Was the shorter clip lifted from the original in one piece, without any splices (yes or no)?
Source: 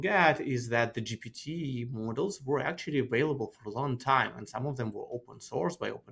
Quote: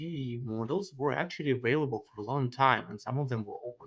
yes